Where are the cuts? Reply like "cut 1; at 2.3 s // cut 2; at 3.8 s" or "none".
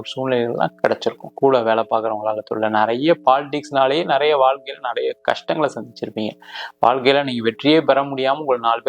cut 1; at 1.3 s